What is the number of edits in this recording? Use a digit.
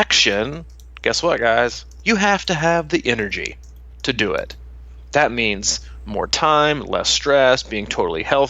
1